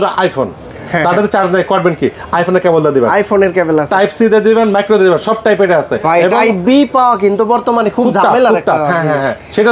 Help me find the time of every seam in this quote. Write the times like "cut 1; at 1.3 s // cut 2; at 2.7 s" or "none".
none